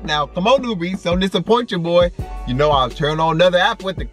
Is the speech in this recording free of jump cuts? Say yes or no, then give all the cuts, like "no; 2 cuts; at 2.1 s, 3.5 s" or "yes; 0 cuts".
yes; 0 cuts